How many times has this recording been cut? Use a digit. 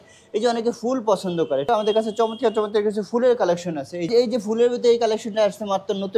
2